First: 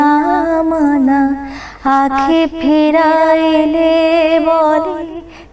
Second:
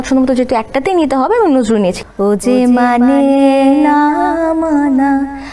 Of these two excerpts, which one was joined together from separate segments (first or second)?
second